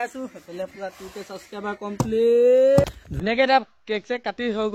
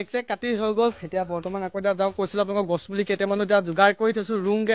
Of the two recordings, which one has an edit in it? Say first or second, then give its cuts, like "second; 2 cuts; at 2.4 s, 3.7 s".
first; 1 cut; at 2.8 s